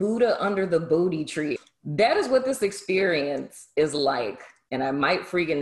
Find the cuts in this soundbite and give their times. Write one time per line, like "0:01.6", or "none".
0:01.5